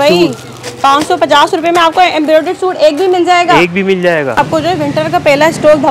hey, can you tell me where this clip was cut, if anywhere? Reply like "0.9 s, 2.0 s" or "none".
4.4 s